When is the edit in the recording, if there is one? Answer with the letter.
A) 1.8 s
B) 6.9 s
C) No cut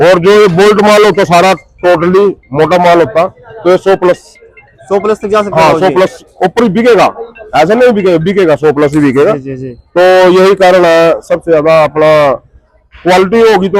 C